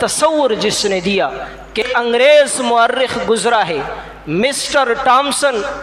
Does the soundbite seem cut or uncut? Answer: cut